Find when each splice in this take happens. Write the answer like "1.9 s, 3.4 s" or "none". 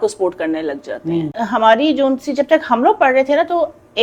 1.3 s